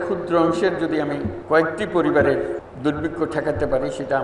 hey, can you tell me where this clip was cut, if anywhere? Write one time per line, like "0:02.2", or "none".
0:01.3
0:02.6